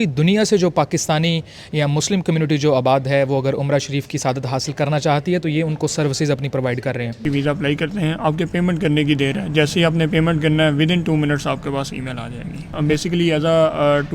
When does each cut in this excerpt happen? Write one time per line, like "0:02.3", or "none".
0:07.2
0:12.7